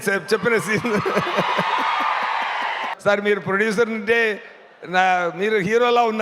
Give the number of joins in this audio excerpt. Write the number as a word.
one